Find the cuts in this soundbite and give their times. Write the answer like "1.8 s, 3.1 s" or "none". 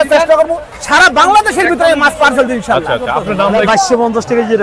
3.5 s